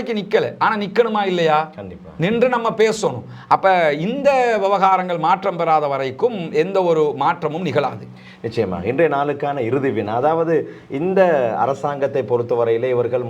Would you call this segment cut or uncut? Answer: uncut